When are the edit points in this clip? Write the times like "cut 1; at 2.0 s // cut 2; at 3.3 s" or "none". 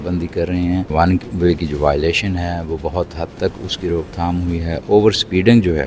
cut 1; at 0.9 s